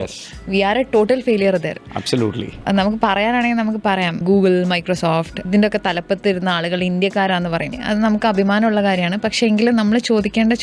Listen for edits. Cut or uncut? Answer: cut